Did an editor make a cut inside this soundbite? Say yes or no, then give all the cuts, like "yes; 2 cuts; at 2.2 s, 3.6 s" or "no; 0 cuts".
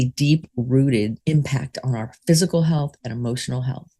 yes; 1 cut; at 1.2 s